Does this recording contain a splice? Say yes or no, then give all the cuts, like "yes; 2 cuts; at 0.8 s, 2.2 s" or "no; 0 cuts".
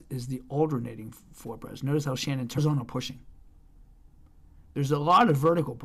no; 0 cuts